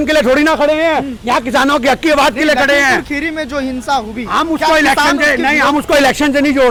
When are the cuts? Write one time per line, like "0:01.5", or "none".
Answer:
none